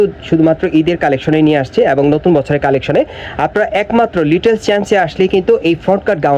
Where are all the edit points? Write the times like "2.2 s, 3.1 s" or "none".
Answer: none